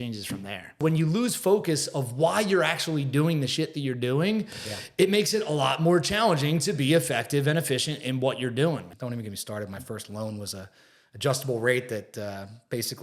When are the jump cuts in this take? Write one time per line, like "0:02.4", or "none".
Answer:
0:00.8
0:08.9